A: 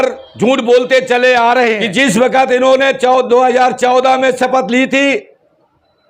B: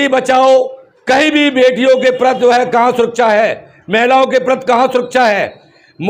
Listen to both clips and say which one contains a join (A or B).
A